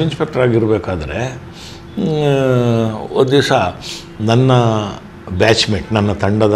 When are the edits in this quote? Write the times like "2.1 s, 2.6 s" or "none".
none